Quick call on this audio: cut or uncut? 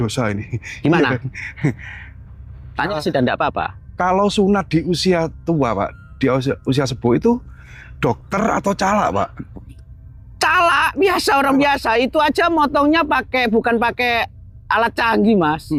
uncut